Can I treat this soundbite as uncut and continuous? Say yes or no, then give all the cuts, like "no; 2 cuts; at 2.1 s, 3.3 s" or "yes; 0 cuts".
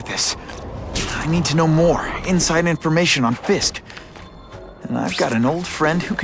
no; 1 cut; at 2.5 s